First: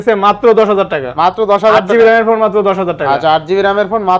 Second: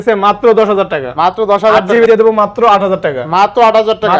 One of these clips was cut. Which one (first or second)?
second